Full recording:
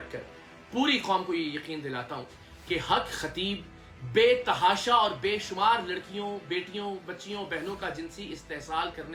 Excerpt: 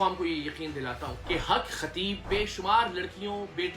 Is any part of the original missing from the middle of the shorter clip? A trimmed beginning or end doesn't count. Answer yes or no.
yes